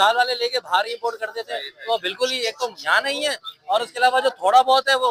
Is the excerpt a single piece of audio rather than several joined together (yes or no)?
yes